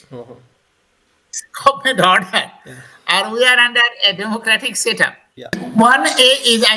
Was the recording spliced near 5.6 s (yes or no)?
yes